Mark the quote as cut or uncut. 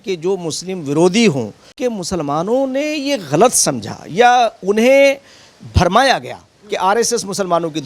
cut